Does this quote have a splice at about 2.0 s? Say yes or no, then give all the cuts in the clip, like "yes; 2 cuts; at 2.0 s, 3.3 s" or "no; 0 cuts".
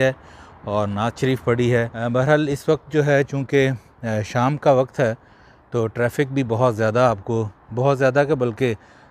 yes; 1 cut; at 2.0 s